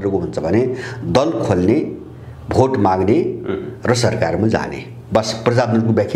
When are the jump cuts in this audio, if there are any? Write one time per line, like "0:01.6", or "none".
none